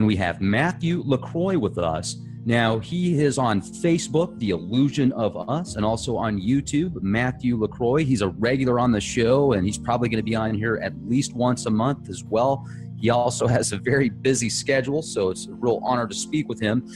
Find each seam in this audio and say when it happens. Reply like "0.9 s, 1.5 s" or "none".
11.4 s

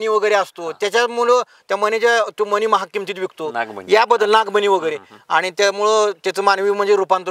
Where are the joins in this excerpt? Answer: none

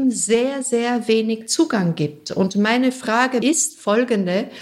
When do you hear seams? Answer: 3.4 s

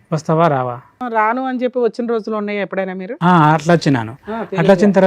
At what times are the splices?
1.0 s

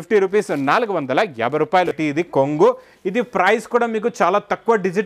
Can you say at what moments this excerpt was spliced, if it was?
1.9 s

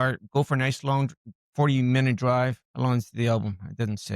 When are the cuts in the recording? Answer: 2.6 s

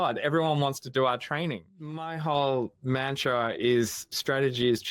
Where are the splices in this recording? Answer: 2.1 s

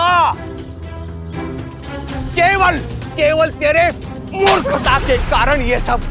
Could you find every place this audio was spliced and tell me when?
2.3 s

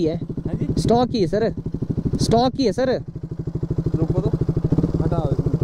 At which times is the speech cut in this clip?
none

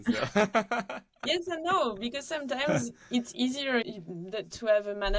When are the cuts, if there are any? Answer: 3.9 s

